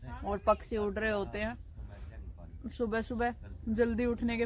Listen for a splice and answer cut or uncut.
uncut